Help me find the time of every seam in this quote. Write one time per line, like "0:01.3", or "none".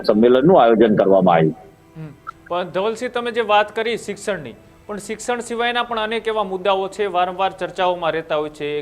none